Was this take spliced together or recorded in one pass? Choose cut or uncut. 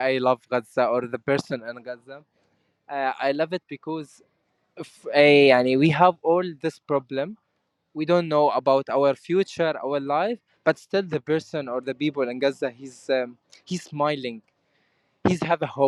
uncut